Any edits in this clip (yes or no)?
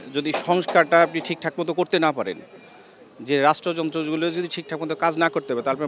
no